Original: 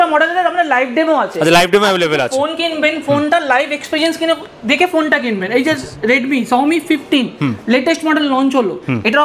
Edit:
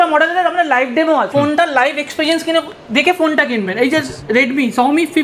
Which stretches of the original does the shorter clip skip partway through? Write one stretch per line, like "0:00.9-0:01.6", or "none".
0:01.3-0:03.0